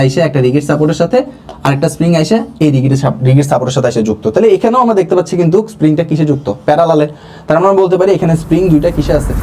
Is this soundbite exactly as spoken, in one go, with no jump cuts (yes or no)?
yes